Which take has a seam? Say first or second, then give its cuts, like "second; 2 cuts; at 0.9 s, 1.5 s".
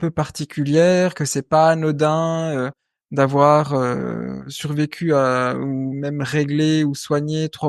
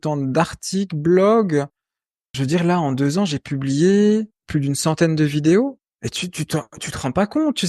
second; 3 cuts; at 2.3 s, 4.4 s, 5.9 s